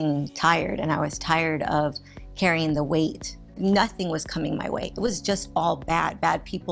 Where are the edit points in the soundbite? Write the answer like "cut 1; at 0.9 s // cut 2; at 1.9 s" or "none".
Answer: cut 1; at 3.5 s